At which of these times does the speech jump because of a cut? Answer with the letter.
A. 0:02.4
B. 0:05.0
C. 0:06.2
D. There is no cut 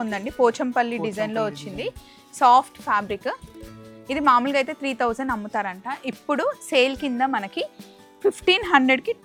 D